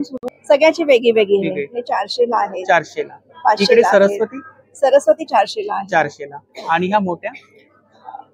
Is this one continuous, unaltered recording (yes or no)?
yes